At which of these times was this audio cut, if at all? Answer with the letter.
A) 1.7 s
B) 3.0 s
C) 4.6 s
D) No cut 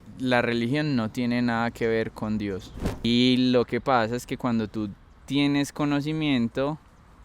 B